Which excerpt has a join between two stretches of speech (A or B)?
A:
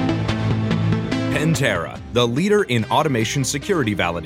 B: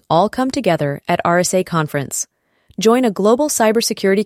A